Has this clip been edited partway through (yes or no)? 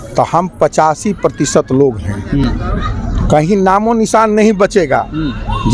no